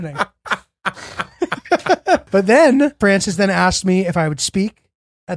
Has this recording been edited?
yes; 2 cuts; at 2.2 s, 2.9 s

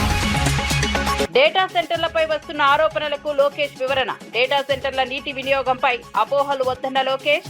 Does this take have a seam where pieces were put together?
yes; 1 cut; at 1.2 s

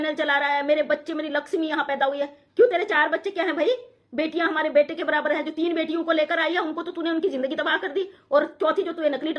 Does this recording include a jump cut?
no; 0 cuts

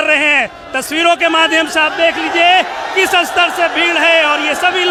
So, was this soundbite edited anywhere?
no; 0 cuts

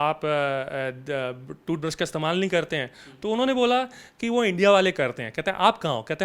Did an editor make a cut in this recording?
no; 0 cuts

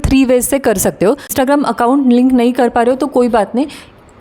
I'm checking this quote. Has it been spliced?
yes; 1 cut; at 1.3 s

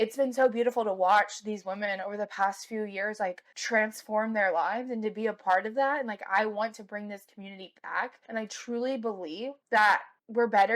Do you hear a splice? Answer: no; 0 cuts

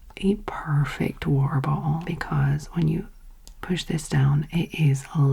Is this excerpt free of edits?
no; 1 cut; at 2.1 s

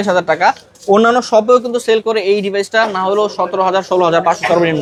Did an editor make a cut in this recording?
no; 0 cuts

